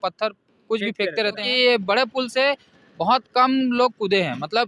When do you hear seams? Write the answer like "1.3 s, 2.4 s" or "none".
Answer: 1.4 s